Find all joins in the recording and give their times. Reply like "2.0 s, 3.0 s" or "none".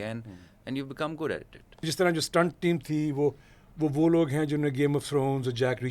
1.9 s